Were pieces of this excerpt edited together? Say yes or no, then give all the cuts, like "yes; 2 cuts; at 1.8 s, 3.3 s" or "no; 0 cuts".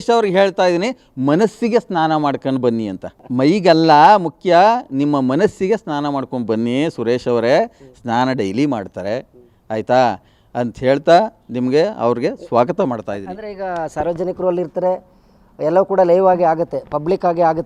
no; 0 cuts